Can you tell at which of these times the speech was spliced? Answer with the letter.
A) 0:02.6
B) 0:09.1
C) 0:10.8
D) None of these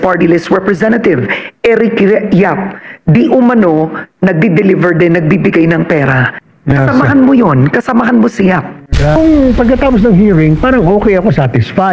B